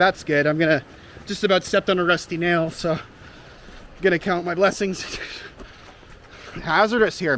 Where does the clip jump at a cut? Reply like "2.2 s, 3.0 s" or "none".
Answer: none